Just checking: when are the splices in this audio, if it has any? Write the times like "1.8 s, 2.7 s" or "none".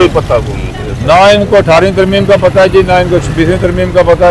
none